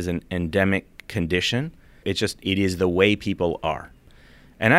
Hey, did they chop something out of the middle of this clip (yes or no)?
yes